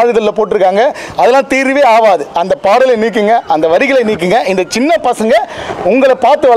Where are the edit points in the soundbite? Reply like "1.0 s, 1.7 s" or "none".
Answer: none